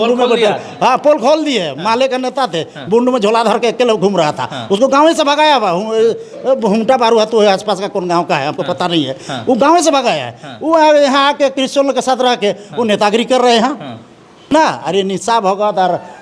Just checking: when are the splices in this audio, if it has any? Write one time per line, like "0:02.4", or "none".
0:14.5